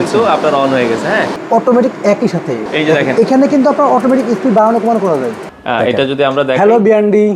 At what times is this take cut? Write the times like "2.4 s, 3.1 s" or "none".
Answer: 1.4 s, 2.6 s, 5.4 s